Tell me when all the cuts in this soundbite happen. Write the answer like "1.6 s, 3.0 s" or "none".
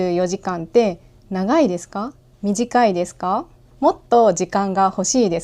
2.2 s, 3.6 s